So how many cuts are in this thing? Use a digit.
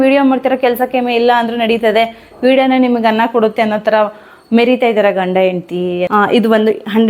1